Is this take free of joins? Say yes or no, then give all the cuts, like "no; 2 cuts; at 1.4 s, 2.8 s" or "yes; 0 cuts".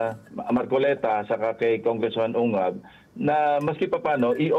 yes; 0 cuts